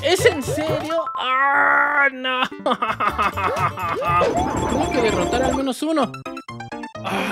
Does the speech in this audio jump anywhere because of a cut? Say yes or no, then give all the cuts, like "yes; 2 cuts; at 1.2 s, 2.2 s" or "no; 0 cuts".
yes; 1 cut; at 4.3 s